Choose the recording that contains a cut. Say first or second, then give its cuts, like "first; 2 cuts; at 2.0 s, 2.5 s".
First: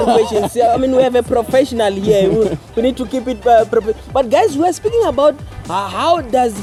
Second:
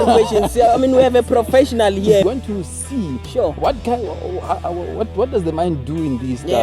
second; 1 cut; at 2.2 s